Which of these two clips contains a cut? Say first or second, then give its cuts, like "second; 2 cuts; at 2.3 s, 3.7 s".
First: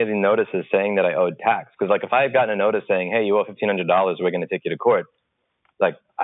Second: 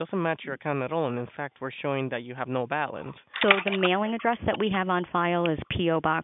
second; 1 cut; at 3.2 s